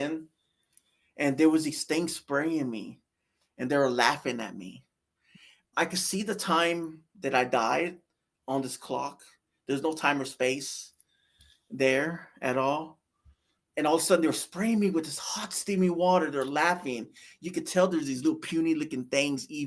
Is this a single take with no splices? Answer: yes; 0 cuts

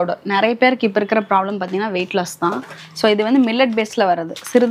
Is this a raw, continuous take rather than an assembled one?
yes; 0 cuts

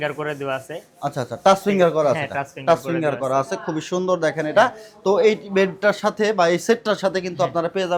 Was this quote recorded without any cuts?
yes; 0 cuts

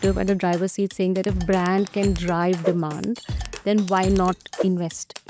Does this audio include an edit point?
no; 0 cuts

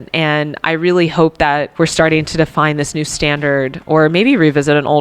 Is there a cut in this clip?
yes; 2 cuts; at 1.7 s, 3.8 s

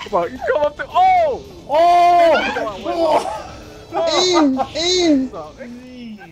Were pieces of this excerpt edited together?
no; 0 cuts

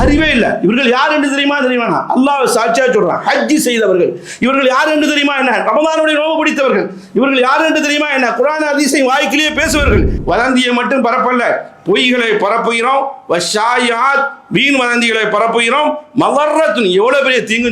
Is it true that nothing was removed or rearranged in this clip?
no; 1 cut; at 10.1 s

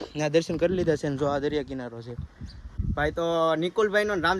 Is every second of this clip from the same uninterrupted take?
no; 1 cut; at 2.8 s

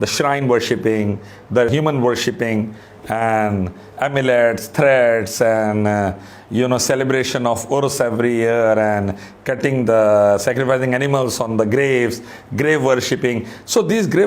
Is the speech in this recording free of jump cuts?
no; 1 cut; at 1.7 s

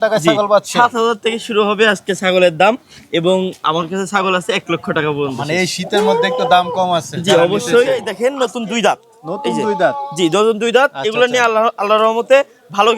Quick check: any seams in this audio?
yes; 1 cut; at 8.0 s

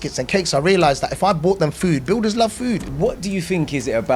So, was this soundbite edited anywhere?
yes; 1 cut; at 2.9 s

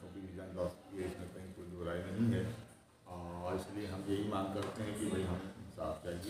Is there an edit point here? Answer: no; 0 cuts

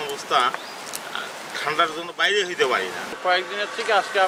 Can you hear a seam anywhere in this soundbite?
no; 0 cuts

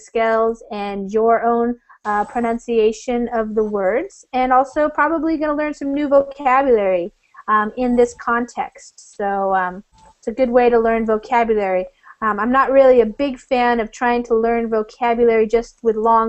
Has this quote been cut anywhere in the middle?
yes; 1 cut; at 5.1 s

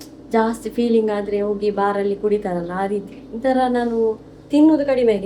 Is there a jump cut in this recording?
no; 0 cuts

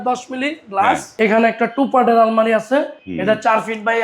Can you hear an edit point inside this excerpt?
yes; 2 cuts; at 1.1 s, 3.0 s

